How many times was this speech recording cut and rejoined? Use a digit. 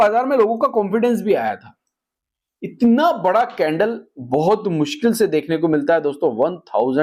0